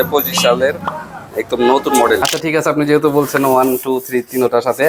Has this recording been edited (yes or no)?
yes